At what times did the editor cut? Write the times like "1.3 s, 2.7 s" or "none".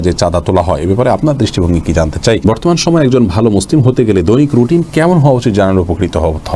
2.4 s